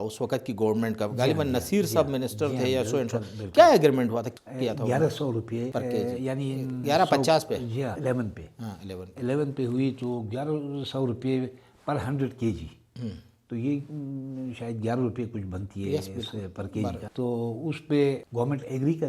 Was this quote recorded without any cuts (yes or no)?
no